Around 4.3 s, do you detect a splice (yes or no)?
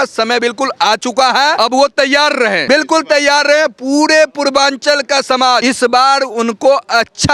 no